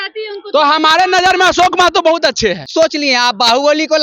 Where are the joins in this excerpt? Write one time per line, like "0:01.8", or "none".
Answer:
0:02.6